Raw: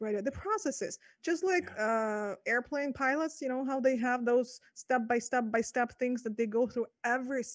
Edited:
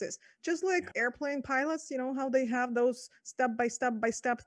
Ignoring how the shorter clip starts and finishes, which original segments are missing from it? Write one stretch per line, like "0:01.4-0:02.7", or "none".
0:01.7-0:02.4